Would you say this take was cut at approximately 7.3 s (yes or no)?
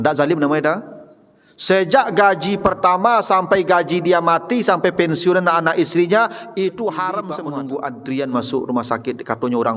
yes